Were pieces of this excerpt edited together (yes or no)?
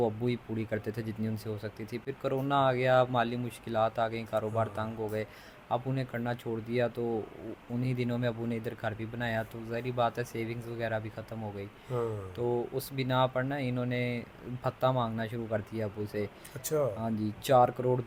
no